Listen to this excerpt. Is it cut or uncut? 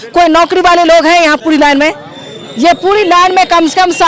uncut